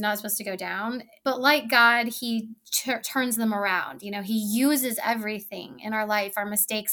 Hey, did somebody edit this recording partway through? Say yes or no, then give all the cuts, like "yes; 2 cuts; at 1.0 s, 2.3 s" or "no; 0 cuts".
yes; 1 cut; at 1.1 s